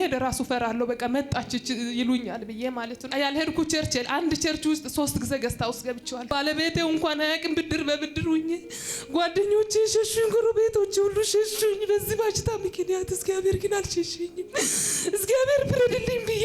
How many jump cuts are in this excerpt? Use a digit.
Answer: 2